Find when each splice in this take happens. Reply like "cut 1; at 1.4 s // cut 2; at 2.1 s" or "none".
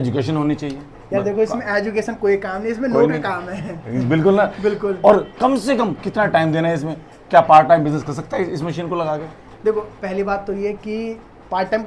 none